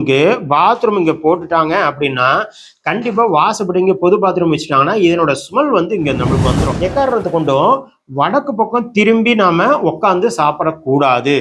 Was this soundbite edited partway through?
yes; 1 cut; at 6.6 s

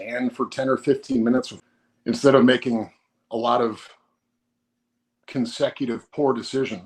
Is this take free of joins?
no; 1 cut; at 1.5 s

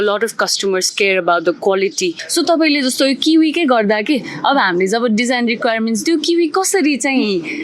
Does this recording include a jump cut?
yes; 1 cut; at 2.2 s

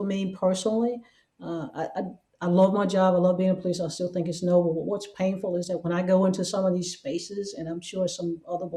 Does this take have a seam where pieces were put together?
no; 0 cuts

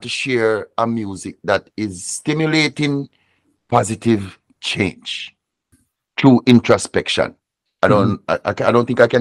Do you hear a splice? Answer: yes; 1 cut; at 5.7 s

